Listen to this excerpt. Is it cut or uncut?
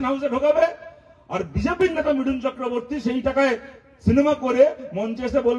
uncut